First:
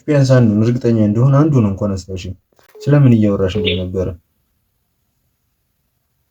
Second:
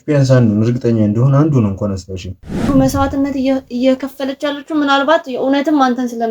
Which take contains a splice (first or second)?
second